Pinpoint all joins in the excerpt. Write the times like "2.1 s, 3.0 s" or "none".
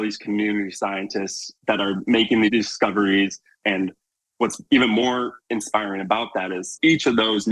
1.6 s, 2.5 s, 3.6 s, 5.4 s, 6.7 s